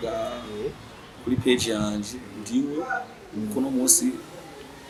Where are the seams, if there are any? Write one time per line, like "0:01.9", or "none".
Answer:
none